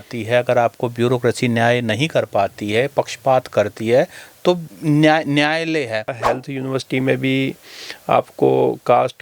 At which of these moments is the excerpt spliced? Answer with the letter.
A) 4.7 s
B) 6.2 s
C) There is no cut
B